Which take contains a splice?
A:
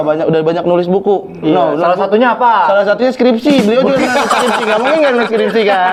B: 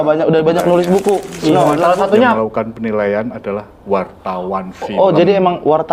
B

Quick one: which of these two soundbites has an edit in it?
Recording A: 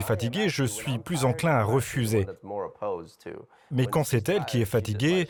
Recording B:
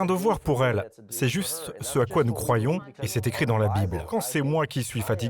B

